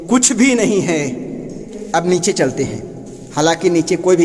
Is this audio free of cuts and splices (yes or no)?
no